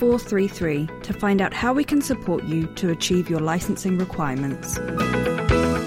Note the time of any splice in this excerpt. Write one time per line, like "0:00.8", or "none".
0:04.8